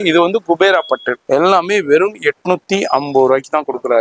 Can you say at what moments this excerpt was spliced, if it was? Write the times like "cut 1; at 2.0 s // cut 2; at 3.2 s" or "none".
cut 1; at 1.1 s